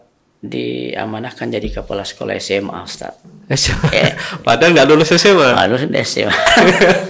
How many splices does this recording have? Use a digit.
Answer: 0